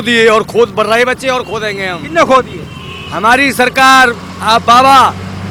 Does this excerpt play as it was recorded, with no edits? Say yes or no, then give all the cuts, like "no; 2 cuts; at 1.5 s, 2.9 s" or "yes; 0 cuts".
yes; 0 cuts